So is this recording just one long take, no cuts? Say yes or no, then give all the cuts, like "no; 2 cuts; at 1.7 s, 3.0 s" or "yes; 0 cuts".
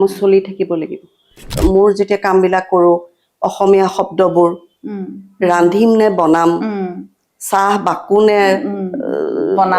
no; 1 cut; at 1.4 s